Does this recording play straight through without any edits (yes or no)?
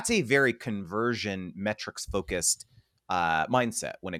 yes